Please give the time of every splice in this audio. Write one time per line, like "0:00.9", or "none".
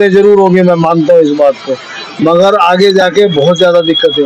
none